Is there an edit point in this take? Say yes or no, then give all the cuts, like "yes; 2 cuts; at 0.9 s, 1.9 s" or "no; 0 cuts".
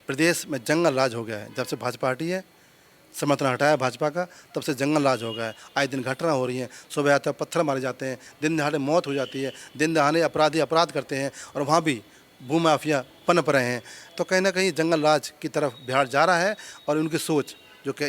no; 0 cuts